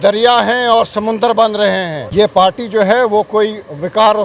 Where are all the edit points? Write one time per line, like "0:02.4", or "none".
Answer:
0:02.0